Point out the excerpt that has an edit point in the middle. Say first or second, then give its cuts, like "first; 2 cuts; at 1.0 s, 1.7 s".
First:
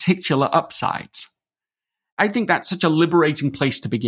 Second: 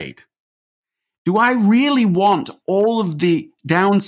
first; 1 cut; at 2.2 s